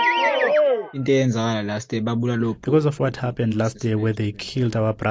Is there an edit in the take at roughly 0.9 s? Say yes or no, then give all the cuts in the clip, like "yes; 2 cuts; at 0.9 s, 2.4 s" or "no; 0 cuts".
yes; 1 cut; at 0.9 s